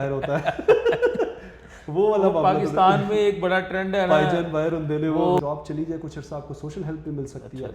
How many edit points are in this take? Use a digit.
1